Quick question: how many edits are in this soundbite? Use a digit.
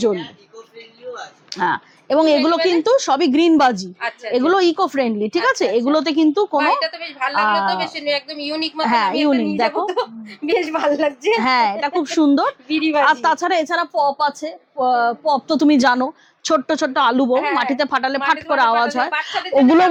0